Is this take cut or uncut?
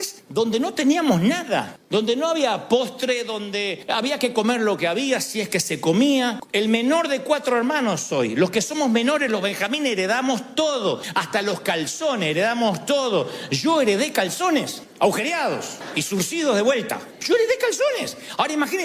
uncut